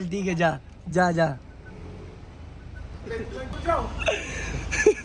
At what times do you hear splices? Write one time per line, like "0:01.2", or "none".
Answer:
none